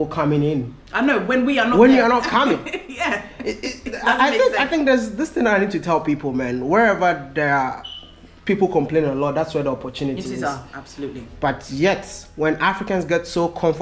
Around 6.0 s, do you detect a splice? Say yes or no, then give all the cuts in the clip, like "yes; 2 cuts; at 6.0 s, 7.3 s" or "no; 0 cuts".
no; 0 cuts